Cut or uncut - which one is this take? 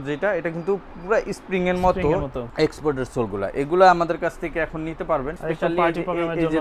cut